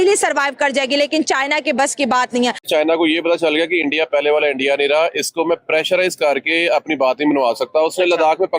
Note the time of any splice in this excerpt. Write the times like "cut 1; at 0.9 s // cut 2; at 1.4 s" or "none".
cut 1; at 2.7 s